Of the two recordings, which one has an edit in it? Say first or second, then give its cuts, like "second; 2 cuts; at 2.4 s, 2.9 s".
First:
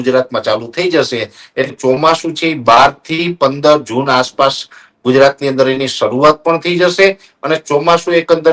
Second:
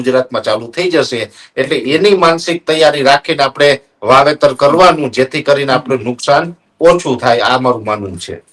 first; 1 cut; at 1.7 s